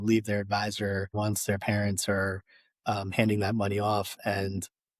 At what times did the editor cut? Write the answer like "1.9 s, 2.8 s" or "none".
1.1 s